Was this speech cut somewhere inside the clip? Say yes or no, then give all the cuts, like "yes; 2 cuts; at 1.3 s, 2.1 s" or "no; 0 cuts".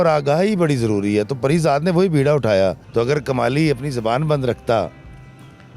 yes; 1 cut; at 2.8 s